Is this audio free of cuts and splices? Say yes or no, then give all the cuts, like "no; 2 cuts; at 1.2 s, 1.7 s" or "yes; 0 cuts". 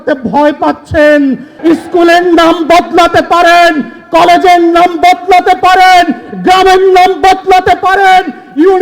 no; 1 cut; at 1.5 s